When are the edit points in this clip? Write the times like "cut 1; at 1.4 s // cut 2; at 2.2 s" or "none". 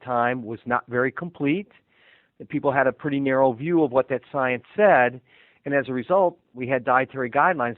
cut 1; at 6.5 s